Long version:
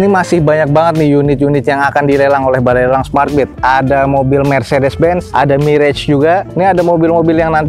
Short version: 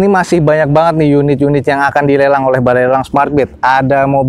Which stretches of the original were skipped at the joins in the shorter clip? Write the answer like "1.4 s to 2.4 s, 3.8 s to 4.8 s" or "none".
none